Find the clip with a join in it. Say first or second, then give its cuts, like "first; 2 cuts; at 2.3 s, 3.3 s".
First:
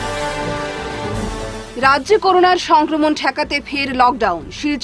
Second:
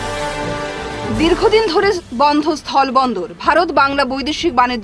second; 1 cut; at 1.0 s